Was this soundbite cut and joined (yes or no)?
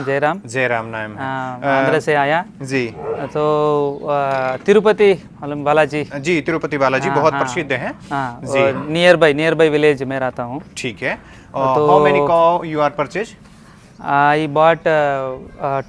no